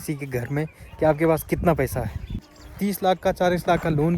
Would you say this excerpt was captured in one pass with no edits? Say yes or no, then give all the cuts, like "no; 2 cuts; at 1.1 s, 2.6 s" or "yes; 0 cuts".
no; 1 cut; at 2.6 s